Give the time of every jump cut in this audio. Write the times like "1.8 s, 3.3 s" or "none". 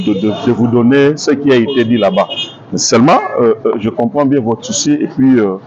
none